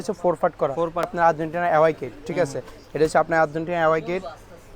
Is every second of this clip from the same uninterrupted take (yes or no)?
no